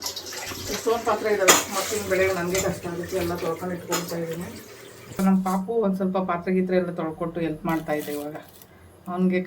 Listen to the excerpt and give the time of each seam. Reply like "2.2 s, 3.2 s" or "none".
5.2 s